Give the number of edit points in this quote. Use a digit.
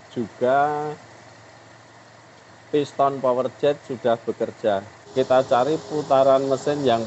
1